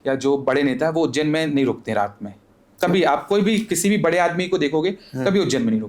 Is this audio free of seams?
yes; 0 cuts

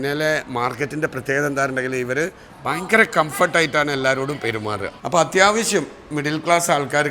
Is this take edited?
yes; 1 cut; at 5.0 s

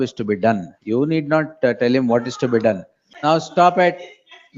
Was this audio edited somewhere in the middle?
yes; 1 cut; at 3.3 s

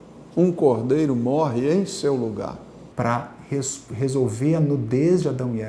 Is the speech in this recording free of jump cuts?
yes; 0 cuts

